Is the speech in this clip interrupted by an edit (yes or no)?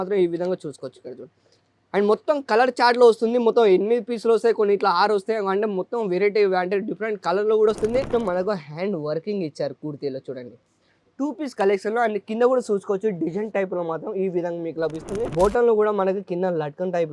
yes